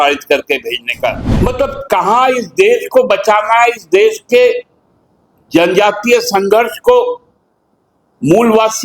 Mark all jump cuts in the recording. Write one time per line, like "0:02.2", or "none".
0:01.2